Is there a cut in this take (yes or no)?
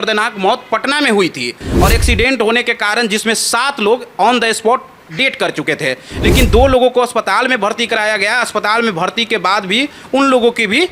yes